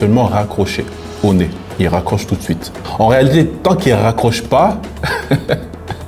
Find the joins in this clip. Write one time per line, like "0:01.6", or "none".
none